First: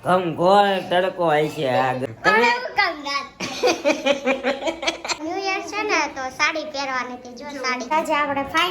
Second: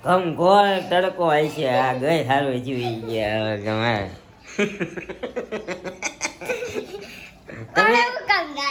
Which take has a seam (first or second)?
first